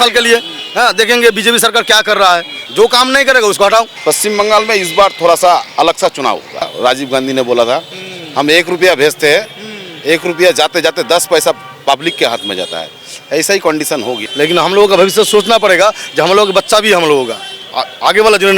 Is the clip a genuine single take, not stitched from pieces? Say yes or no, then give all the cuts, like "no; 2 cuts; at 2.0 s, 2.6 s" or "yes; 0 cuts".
no; 4 cuts; at 2.5 s, 3.9 s, 6.7 s, 14.2 s